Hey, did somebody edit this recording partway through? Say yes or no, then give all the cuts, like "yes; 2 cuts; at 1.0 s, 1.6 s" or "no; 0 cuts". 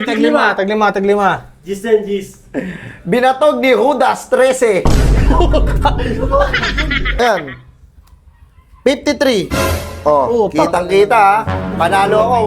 yes; 1 cut; at 7.2 s